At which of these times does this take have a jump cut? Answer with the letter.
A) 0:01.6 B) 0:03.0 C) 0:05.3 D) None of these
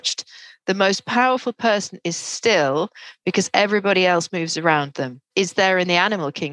C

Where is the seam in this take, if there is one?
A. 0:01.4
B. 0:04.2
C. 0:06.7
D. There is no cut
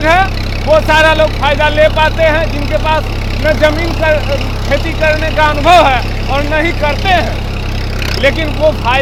D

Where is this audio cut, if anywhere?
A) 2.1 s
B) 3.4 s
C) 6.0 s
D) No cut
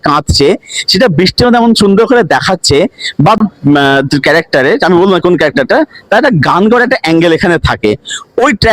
B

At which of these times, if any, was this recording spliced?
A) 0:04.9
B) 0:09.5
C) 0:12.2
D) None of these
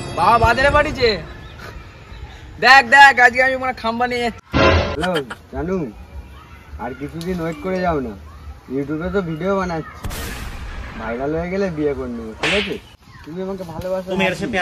A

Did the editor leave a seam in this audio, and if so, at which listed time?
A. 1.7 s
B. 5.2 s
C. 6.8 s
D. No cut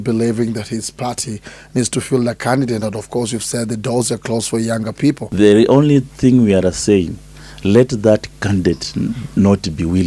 B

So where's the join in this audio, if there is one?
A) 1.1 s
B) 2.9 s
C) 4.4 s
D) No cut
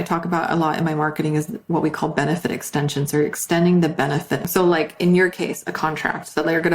C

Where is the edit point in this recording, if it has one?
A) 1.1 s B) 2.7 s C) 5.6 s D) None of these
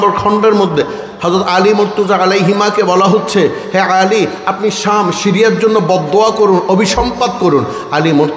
D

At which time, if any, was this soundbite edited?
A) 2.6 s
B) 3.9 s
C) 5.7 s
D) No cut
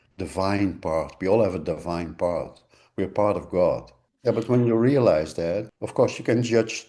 C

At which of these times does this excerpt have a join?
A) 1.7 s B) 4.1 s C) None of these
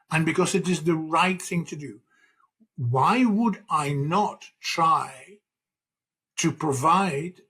C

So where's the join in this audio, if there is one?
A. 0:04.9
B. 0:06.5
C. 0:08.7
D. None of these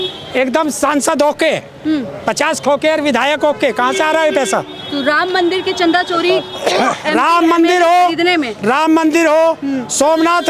D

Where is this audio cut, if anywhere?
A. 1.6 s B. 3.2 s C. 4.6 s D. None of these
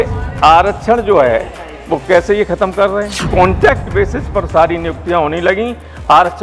B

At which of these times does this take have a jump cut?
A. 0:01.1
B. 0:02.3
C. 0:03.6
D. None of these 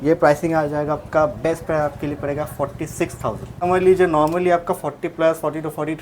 C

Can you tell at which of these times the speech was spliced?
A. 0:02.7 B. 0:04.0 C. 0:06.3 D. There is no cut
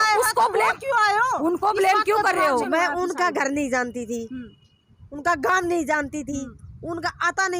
A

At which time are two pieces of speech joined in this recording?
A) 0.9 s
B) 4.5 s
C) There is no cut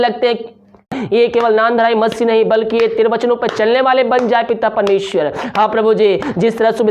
A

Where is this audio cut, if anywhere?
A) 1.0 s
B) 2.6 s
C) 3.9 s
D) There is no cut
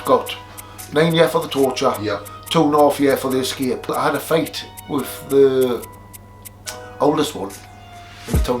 C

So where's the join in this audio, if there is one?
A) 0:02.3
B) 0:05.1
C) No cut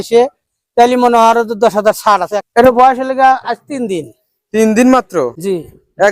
A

